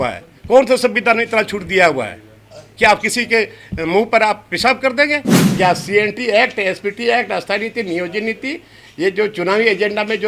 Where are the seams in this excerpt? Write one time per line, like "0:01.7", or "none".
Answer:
0:05.4